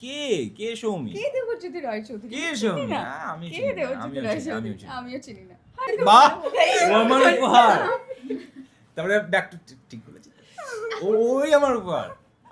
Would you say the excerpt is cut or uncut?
cut